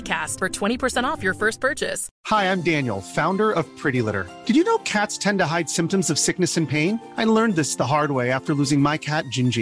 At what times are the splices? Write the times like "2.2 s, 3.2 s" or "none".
2.1 s